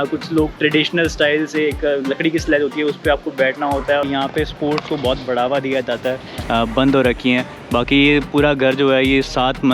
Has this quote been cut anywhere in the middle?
yes; 2 cuts; at 4.0 s, 6.3 s

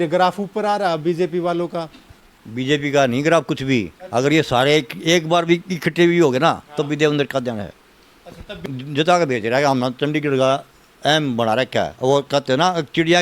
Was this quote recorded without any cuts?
no; 1 cut; at 8.6 s

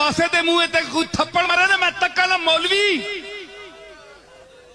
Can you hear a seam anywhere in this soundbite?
yes; 1 cut; at 1.5 s

